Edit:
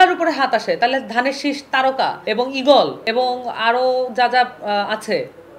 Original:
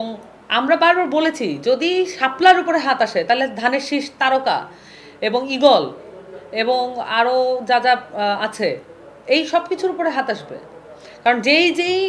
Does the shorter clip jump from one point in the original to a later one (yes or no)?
yes